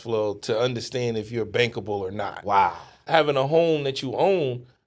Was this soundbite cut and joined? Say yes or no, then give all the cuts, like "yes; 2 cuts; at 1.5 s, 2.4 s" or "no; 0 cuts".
yes; 1 cut; at 3.0 s